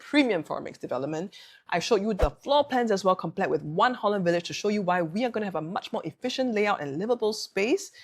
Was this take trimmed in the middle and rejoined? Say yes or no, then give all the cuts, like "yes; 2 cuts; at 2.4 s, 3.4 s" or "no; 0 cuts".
no; 0 cuts